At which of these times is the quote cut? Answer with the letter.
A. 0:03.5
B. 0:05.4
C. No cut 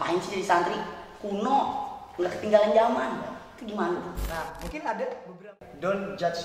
B